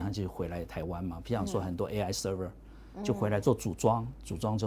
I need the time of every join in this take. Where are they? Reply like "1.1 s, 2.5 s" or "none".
none